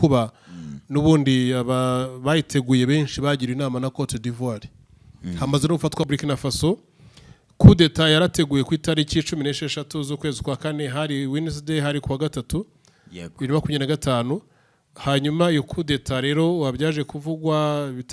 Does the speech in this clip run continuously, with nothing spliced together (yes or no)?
no